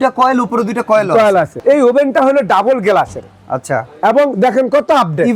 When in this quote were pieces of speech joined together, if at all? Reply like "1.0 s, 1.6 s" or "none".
1.5 s